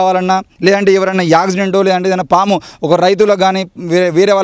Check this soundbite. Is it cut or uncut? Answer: uncut